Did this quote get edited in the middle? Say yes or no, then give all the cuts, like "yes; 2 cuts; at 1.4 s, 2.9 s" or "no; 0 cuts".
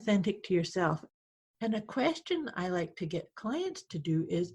yes; 1 cut; at 1.0 s